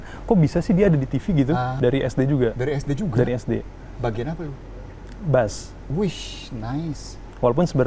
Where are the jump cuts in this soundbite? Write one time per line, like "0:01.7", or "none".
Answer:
0:01.7